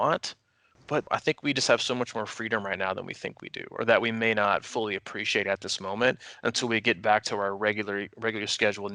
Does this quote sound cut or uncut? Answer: cut